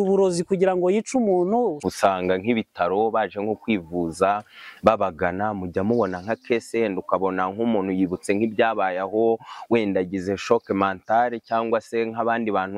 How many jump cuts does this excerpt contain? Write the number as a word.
one